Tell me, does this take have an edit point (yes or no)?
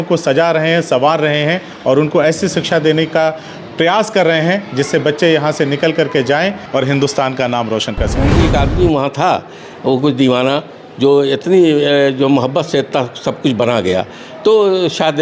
yes